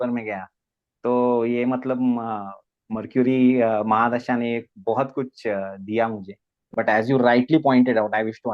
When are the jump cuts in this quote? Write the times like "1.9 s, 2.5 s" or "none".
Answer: 6.7 s